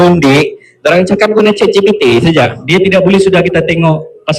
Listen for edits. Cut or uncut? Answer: cut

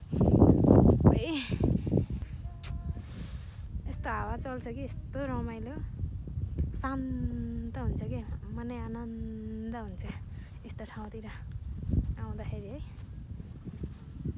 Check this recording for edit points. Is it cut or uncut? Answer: cut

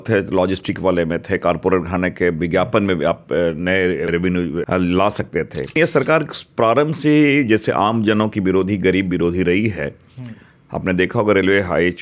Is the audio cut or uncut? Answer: cut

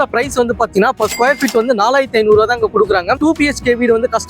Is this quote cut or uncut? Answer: cut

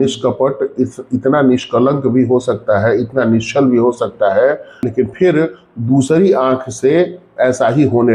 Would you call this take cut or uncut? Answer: cut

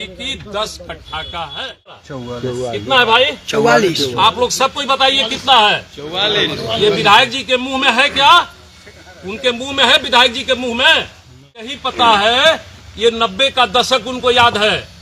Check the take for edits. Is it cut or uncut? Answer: cut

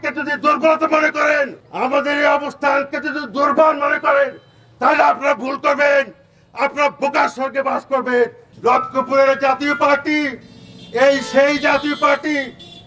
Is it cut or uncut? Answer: cut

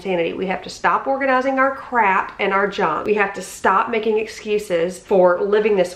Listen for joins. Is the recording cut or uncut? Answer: cut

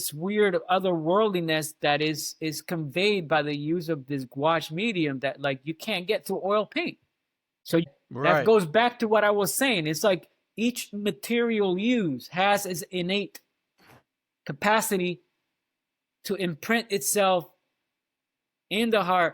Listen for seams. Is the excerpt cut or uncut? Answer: cut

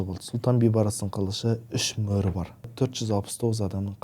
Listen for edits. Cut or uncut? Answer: cut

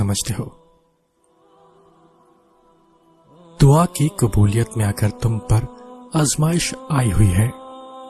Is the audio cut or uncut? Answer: uncut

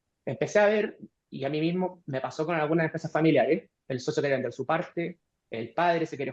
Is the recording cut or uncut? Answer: cut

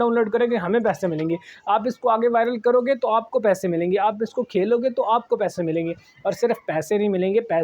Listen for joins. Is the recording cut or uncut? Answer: uncut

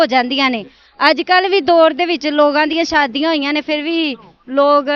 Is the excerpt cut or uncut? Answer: uncut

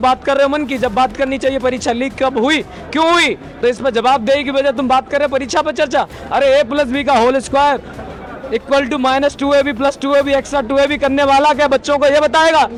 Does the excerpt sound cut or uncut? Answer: uncut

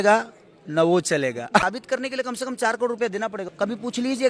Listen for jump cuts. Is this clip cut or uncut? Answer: cut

